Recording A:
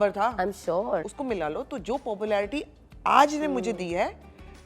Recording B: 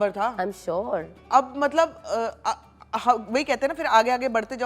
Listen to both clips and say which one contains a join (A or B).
A